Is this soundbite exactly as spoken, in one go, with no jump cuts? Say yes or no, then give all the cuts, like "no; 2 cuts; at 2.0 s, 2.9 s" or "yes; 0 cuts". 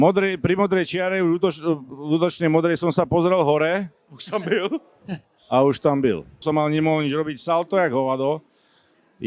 no; 1 cut; at 6.4 s